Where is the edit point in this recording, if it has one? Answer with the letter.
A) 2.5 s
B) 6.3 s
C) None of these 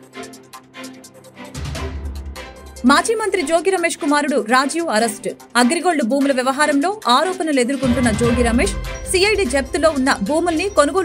A